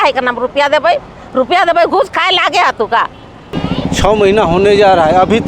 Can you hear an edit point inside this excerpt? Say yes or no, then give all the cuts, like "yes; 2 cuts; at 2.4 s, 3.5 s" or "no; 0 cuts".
yes; 1 cut; at 3.5 s